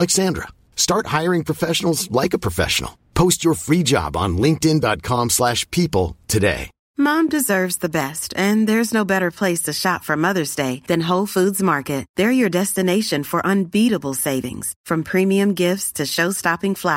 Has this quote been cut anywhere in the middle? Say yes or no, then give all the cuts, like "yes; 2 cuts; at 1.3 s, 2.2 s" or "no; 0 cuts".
yes; 1 cut; at 6.8 s